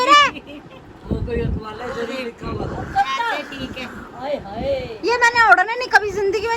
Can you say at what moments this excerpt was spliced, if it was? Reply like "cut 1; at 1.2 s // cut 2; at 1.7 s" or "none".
cut 1; at 3.5 s

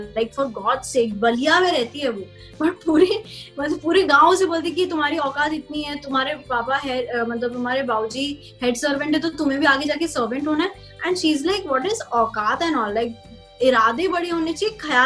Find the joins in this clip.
none

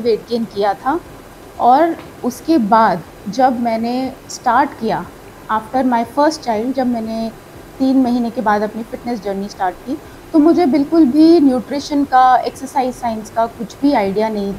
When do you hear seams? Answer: none

